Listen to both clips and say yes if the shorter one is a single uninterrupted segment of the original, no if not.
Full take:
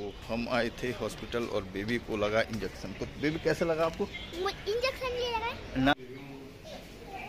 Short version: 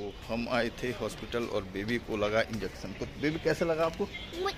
yes